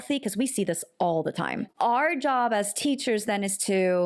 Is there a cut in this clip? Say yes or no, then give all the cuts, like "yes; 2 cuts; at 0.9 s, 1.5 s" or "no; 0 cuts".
yes; 1 cut; at 1.6 s